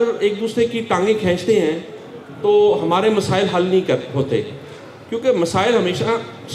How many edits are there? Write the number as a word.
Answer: zero